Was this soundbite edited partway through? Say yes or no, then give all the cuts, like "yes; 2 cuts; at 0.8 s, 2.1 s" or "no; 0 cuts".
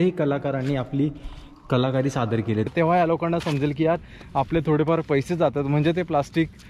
yes; 1 cut; at 2.7 s